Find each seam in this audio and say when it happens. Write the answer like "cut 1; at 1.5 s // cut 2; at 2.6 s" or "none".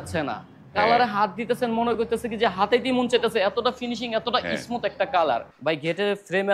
cut 1; at 5.5 s